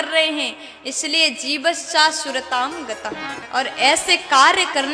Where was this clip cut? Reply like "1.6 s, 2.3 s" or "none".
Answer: 3.4 s